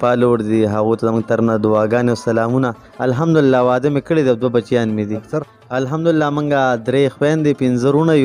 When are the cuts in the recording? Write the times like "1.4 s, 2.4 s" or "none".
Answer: 2.8 s, 5.4 s